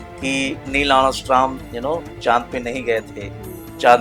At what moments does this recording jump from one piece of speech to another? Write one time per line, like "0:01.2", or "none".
none